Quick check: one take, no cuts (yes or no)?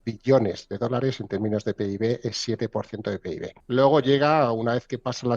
no